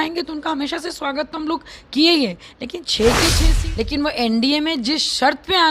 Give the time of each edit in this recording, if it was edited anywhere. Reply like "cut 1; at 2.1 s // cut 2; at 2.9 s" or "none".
cut 1; at 3.5 s